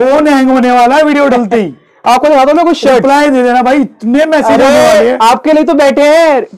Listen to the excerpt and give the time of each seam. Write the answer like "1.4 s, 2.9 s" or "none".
none